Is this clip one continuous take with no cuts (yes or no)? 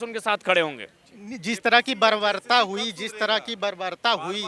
yes